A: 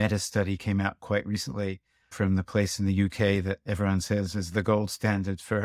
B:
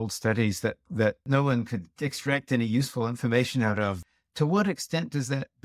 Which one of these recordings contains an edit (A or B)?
B